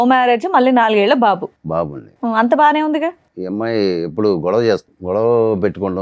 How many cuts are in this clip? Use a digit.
2